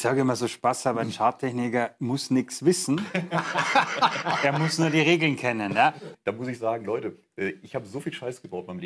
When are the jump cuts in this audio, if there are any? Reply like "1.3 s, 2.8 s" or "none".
6.1 s